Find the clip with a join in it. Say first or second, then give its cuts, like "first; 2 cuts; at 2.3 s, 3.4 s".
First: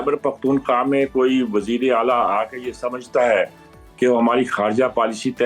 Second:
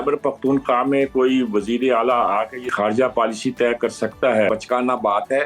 second; 2 cuts; at 2.7 s, 4.5 s